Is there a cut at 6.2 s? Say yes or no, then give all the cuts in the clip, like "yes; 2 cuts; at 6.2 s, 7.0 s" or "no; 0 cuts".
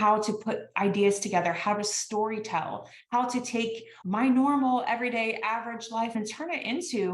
yes; 2 cuts; at 3.9 s, 6.2 s